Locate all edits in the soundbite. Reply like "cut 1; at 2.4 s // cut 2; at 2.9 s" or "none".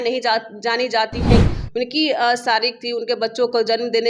cut 1; at 1.4 s